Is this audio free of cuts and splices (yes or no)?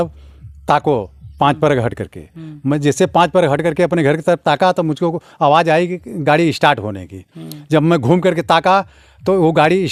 yes